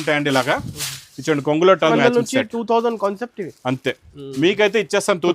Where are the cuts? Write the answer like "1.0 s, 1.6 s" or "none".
1.9 s